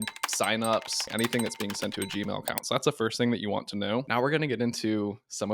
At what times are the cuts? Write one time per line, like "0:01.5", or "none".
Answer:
0:01.1
0:04.1